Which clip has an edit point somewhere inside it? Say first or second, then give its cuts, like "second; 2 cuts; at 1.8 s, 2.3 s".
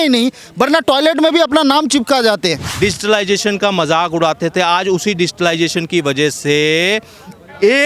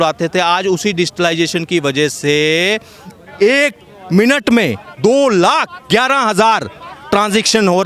first; 1 cut; at 2.6 s